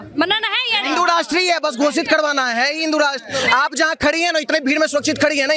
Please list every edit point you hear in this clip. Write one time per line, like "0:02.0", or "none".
none